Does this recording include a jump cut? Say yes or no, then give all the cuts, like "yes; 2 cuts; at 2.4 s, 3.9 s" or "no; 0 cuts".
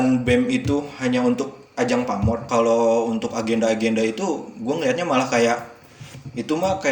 yes; 1 cut; at 2.4 s